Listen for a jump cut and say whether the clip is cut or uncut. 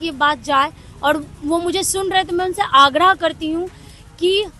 uncut